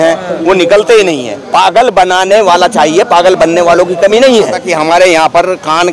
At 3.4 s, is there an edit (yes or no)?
no